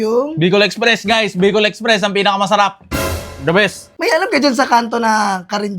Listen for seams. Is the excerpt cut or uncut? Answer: cut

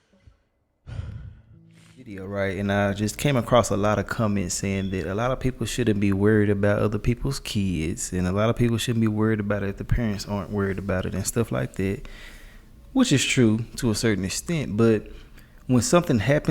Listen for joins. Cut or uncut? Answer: cut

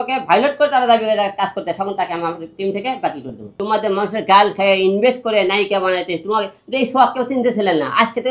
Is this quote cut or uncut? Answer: cut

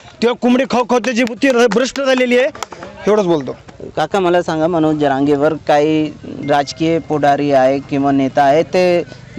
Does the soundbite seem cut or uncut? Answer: uncut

